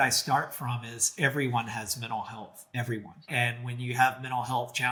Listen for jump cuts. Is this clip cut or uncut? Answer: uncut